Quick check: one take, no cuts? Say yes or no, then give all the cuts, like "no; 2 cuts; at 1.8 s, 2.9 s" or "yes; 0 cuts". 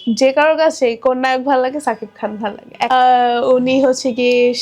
no; 1 cut; at 2.9 s